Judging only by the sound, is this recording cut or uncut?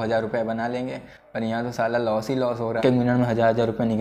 cut